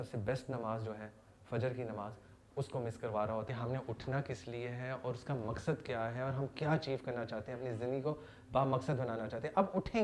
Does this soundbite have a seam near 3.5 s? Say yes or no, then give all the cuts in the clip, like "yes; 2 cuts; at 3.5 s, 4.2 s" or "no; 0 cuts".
yes; 1 cut; at 3.5 s